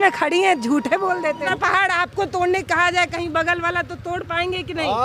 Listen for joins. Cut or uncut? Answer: cut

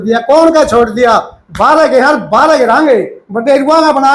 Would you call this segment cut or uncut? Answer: uncut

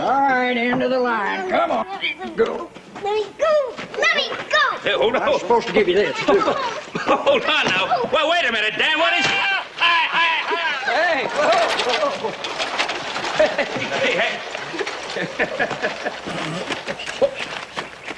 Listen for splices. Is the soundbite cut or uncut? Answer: cut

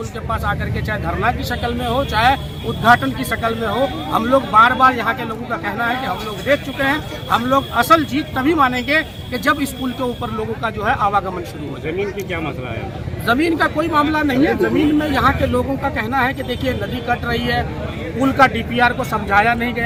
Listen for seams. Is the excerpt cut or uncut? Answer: uncut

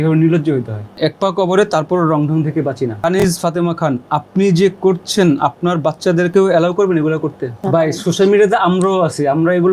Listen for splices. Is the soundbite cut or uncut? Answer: cut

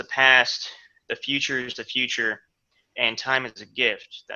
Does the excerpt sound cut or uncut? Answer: uncut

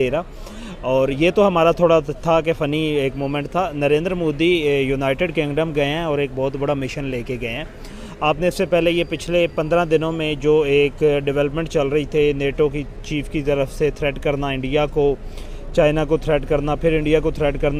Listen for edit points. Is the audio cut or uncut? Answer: uncut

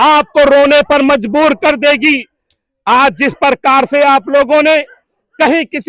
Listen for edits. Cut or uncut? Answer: uncut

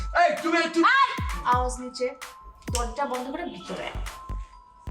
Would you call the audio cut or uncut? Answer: cut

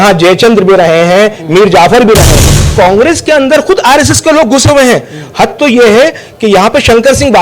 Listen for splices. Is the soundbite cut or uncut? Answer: cut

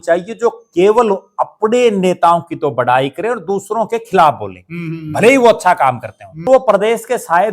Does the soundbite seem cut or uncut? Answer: cut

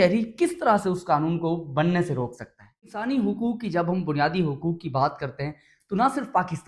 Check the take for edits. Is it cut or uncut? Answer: cut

